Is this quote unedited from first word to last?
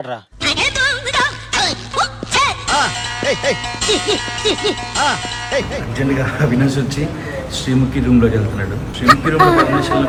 yes; 0 cuts

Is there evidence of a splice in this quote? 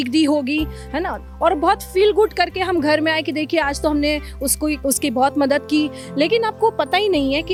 no; 0 cuts

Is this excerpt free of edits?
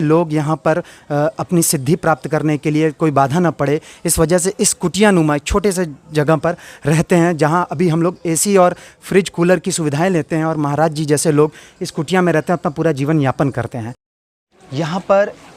no; 1 cut; at 14.1 s

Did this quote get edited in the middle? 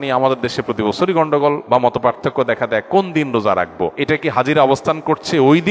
yes; 2 cuts; at 1.6 s, 3.7 s

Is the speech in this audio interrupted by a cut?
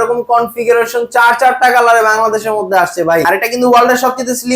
yes; 1 cut; at 3.2 s

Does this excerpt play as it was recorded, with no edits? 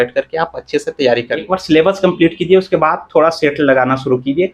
no; 1 cut; at 1.4 s

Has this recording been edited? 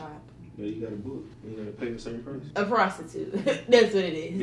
yes; 2 cuts; at 1.3 s, 2.4 s

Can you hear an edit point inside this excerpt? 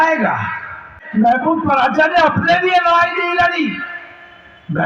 yes; 1 cut; at 1.0 s

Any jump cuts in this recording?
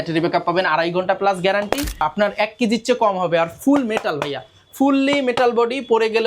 yes; 1 cut; at 2.0 s

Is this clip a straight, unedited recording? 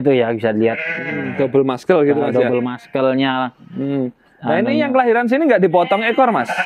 yes; 0 cuts

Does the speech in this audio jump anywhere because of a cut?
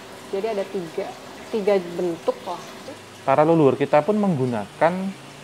yes; 1 cut; at 2.9 s

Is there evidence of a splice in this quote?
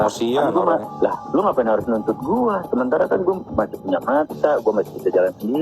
yes; 1 cut; at 1.1 s

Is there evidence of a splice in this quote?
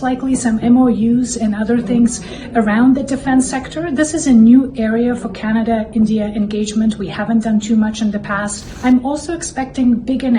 yes; 1 cut; at 8.6 s

